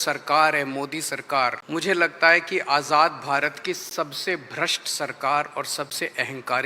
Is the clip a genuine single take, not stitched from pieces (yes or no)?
no